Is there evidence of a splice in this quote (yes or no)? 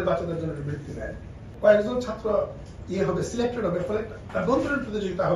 yes